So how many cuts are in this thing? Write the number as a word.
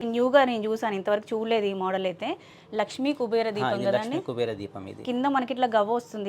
zero